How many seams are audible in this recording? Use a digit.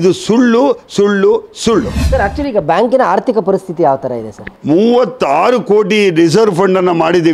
2